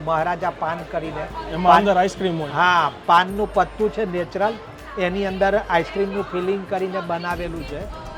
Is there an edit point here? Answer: no; 0 cuts

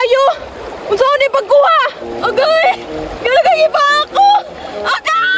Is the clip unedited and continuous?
yes; 0 cuts

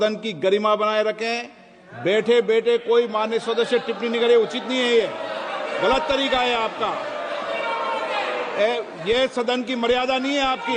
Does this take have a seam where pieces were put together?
no; 0 cuts

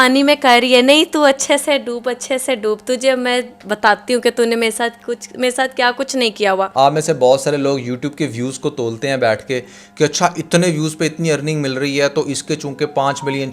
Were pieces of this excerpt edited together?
yes; 1 cut; at 6.7 s

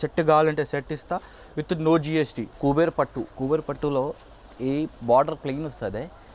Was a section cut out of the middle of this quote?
yes; 2 cuts; at 2.5 s, 3.3 s

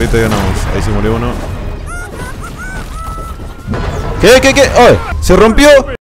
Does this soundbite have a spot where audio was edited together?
no; 0 cuts

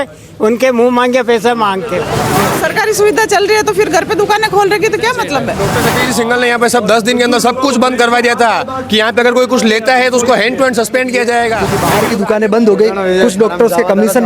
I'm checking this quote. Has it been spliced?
yes; 3 cuts; at 2.2 s, 5.7 s, 11.8 s

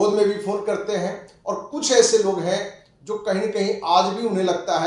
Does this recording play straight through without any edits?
yes; 0 cuts

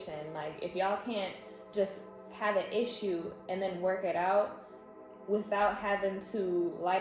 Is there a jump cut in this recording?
no; 0 cuts

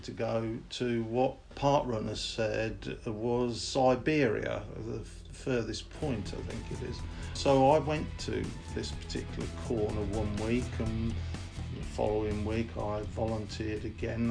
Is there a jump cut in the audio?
yes; 2 cuts; at 1.5 s, 7.4 s

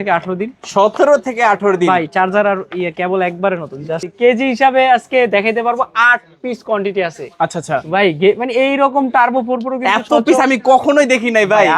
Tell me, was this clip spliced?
yes; 1 cut; at 4.0 s

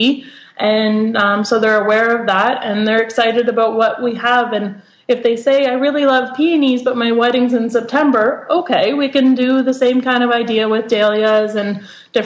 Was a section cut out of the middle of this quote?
no; 0 cuts

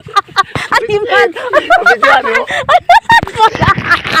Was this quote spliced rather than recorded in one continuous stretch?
no; 0 cuts

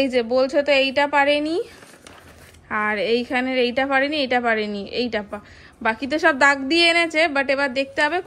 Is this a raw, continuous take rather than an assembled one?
yes; 0 cuts

